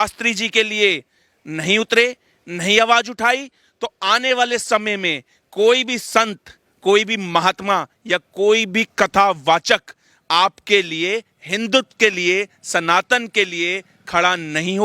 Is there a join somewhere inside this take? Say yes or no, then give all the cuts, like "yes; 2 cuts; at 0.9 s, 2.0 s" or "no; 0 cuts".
no; 0 cuts